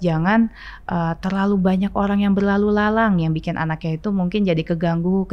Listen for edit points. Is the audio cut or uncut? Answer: uncut